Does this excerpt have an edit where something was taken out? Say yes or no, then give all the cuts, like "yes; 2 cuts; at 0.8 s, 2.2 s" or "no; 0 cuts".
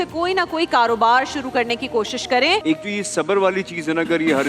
yes; 1 cut; at 2.6 s